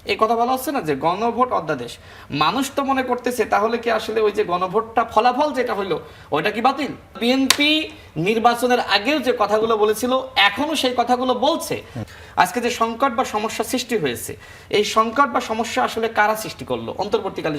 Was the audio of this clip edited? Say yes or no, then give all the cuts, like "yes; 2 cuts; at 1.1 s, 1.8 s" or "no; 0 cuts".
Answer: yes; 2 cuts; at 7.2 s, 11.9 s